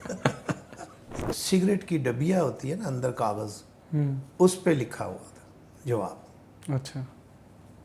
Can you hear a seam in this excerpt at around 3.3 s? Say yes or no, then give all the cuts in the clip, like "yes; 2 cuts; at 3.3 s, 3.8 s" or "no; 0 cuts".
no; 1 cut; at 1.2 s